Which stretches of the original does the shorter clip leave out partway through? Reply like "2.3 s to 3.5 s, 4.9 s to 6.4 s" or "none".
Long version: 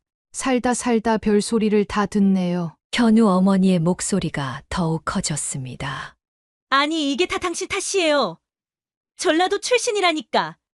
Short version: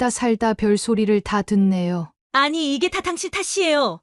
2.8 s to 6.5 s